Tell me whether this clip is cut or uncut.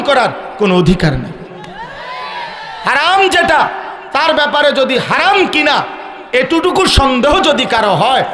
uncut